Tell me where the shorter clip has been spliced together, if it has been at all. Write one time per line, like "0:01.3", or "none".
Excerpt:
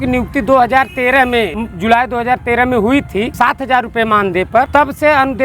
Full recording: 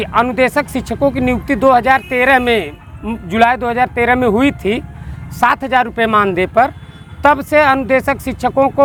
0:01.6
0:03.3
0:04.7